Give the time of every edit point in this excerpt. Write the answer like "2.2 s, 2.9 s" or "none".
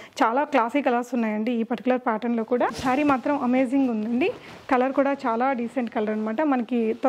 2.8 s